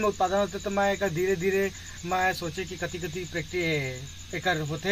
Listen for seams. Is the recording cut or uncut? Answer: uncut